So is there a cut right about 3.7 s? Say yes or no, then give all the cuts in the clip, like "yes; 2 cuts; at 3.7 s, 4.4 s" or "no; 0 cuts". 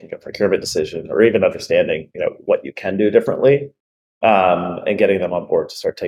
no; 0 cuts